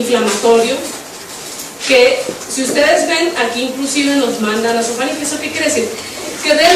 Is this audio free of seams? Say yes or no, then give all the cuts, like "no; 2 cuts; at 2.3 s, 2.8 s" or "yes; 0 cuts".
no; 1 cut; at 5.3 s